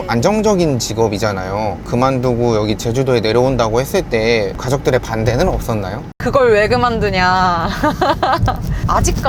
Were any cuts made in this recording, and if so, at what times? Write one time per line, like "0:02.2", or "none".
0:06.2